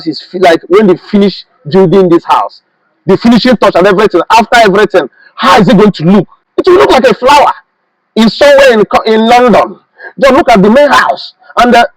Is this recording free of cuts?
yes; 0 cuts

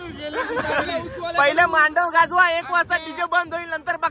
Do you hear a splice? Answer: no; 0 cuts

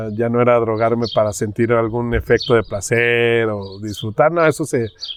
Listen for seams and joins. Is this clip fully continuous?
yes; 0 cuts

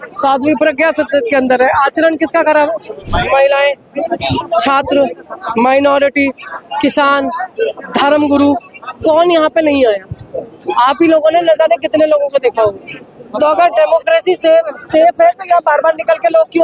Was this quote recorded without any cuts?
no; 1 cut; at 3.1 s

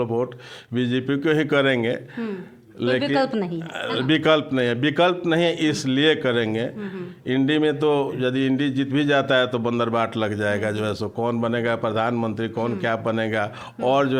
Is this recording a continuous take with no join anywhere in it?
yes; 0 cuts

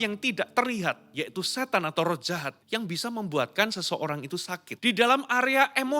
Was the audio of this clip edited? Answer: yes; 2 cuts; at 2.5 s, 4.6 s

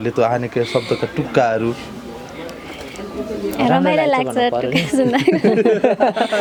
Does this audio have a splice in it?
no; 0 cuts

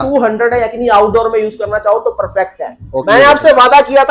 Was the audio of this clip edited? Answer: yes; 1 cut; at 3.0 s

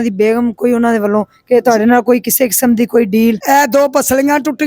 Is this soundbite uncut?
no; 1 cut; at 3.4 s

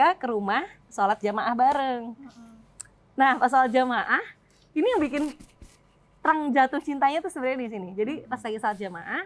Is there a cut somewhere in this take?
no; 0 cuts

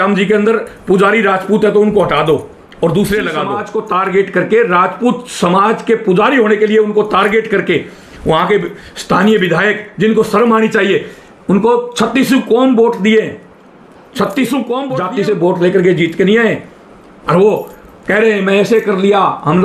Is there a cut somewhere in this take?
yes; 2 cuts; at 3.6 s, 15.0 s

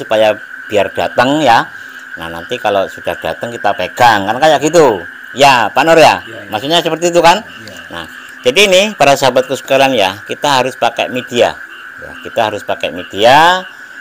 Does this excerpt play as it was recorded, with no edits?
yes; 0 cuts

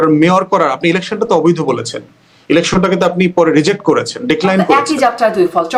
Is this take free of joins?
yes; 0 cuts

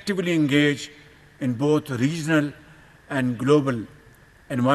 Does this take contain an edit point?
no; 0 cuts

